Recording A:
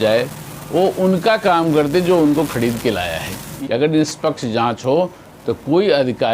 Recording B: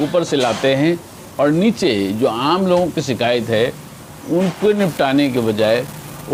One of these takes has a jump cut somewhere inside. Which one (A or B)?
A